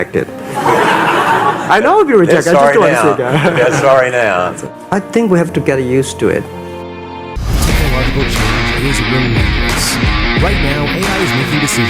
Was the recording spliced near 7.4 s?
yes; 1 cut; at 7.4 s

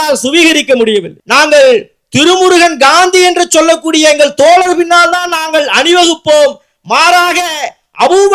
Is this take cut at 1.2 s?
yes; 1 cut; at 1.2 s

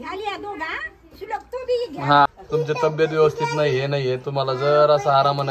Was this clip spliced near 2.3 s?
yes; 1 cut; at 2.3 s

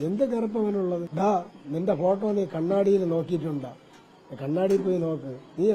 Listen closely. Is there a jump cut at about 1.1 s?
yes; 1 cut; at 1.1 s

